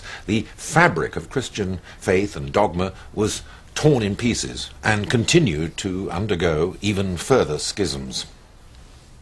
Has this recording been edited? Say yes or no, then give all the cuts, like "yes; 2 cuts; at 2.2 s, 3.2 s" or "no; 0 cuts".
yes; 1 cut; at 3.5 s